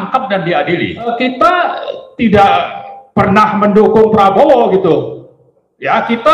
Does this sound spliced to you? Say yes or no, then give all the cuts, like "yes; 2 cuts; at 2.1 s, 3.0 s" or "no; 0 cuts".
yes; 1 cut; at 1.1 s